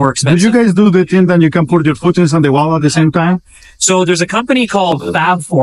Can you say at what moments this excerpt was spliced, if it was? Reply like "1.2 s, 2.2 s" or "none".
none